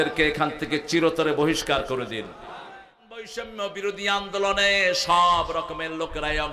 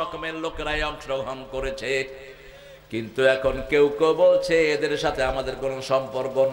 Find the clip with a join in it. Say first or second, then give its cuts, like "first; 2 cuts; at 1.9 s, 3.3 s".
first; 1 cut; at 3.3 s